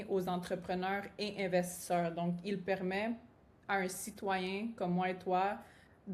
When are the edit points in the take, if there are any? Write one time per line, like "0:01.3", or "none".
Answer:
none

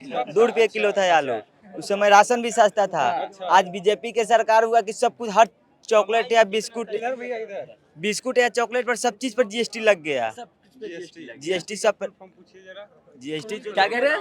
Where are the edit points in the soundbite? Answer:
none

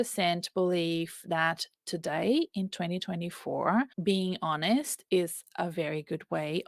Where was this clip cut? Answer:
0:03.9

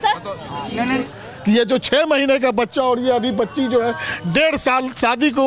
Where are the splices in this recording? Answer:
0:01.0

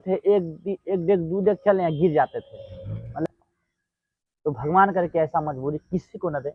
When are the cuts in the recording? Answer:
0:03.3

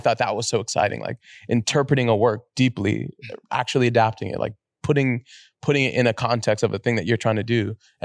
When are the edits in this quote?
none

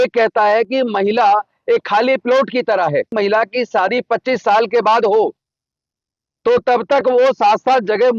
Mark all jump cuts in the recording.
0:03.1

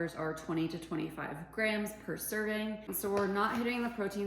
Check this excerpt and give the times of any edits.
0:02.9

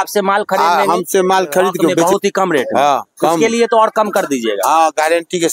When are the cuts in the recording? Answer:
0:02.0

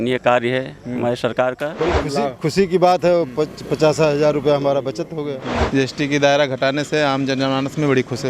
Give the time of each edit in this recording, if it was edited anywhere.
0:01.7
0:05.5

